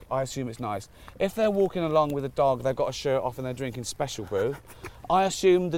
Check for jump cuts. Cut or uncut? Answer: uncut